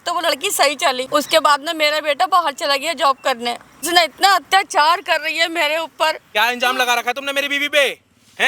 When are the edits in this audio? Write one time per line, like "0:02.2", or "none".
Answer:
0:01.0
0:03.8
0:06.2